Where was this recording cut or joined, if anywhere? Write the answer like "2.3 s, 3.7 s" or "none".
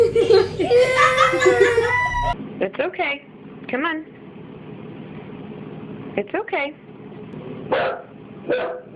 2.4 s, 7.3 s